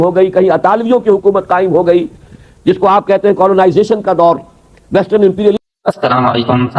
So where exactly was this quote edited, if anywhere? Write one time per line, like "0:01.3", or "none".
0:05.6